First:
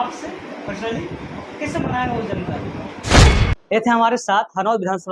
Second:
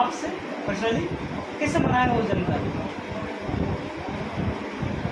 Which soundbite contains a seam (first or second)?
first